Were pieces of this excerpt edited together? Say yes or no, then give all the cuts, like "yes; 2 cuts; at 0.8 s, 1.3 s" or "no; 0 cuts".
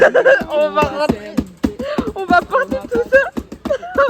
no; 0 cuts